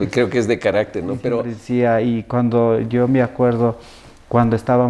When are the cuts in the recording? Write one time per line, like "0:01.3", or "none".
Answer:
0:01.5

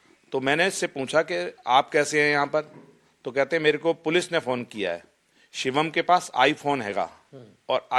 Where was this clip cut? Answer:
none

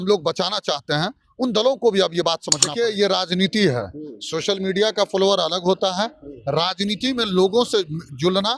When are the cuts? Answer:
0:02.5

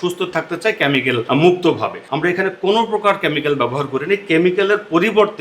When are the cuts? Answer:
0:01.2
0:02.0

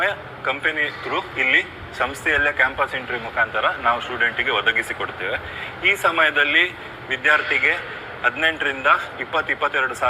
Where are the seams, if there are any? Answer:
none

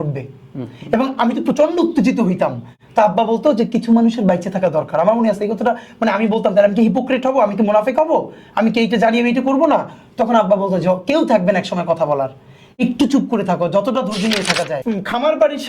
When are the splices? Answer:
0:14.7

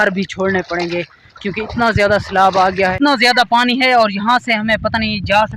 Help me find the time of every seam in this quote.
0:02.9

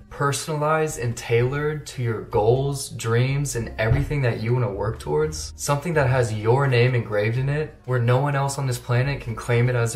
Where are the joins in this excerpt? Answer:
none

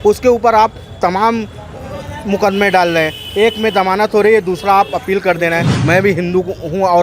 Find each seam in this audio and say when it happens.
0:05.7

